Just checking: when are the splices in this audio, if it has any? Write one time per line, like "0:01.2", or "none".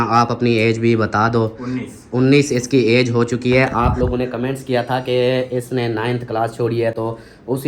none